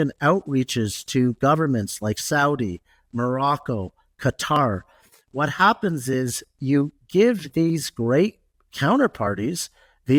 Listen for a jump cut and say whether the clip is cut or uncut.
uncut